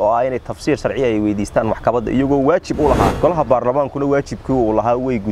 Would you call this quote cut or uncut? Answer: cut